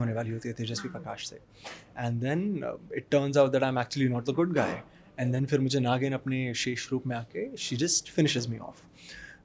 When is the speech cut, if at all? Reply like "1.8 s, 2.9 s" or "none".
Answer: none